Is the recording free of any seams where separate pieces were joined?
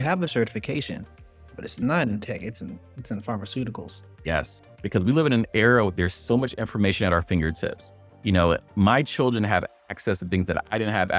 no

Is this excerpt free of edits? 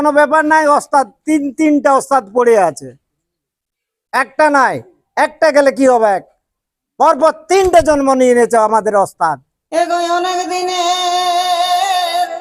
no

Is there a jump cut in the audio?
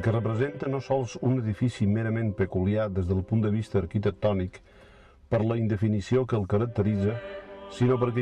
yes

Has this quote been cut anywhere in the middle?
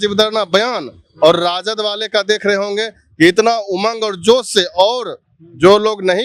no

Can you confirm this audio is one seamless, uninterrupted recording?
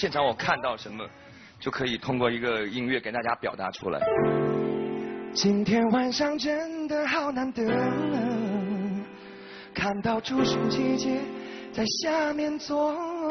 yes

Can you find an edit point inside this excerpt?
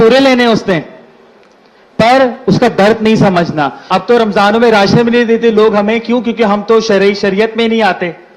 yes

